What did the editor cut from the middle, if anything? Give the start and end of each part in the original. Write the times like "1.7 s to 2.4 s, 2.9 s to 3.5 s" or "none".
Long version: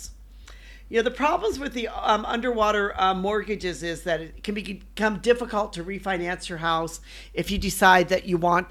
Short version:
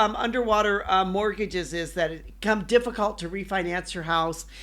4.3 s to 4.8 s